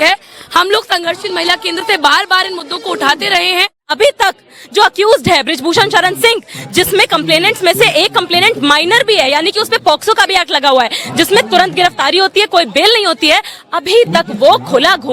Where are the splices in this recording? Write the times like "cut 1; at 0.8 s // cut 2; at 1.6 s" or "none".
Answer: cut 1; at 3.9 s